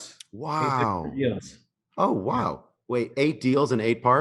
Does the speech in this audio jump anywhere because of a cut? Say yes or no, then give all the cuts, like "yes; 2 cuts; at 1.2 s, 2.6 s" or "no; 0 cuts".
no; 0 cuts